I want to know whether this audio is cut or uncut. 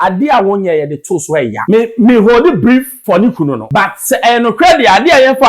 cut